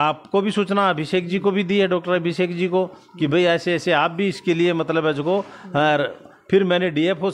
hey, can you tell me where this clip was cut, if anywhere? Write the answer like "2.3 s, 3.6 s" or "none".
none